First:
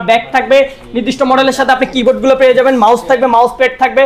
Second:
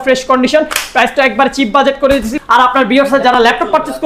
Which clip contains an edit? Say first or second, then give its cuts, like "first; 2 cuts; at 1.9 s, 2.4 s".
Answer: second; 1 cut; at 2.3 s